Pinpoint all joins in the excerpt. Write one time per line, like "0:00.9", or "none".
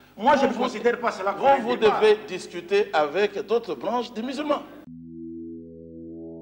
0:04.9